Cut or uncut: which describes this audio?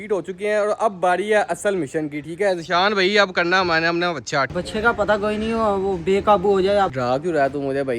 cut